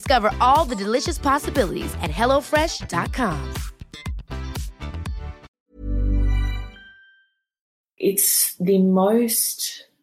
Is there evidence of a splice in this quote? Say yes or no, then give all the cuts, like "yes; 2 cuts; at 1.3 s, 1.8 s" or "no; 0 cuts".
yes; 1 cut; at 7.9 s